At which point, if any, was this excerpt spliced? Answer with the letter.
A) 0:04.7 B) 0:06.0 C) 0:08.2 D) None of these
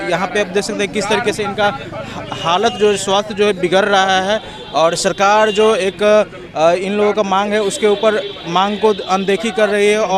D